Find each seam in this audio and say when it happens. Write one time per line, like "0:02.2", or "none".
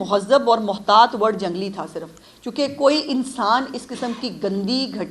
none